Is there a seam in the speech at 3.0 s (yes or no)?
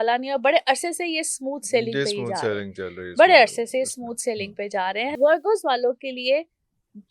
no